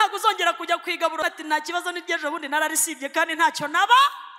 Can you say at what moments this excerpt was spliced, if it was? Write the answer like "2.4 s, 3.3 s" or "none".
1.2 s